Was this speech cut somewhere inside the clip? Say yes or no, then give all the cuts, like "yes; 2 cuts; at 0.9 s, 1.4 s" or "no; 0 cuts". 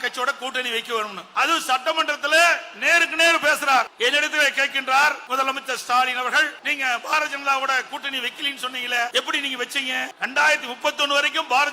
yes; 6 cuts; at 1.2 s, 3.9 s, 5.2 s, 6.6 s, 9.1 s, 10.1 s